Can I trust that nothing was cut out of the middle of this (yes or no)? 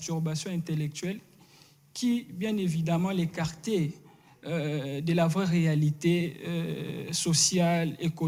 yes